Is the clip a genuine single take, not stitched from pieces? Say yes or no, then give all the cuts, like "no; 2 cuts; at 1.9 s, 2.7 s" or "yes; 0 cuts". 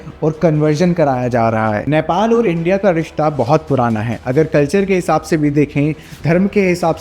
no; 1 cut; at 1.8 s